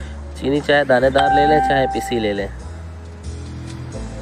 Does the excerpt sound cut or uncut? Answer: cut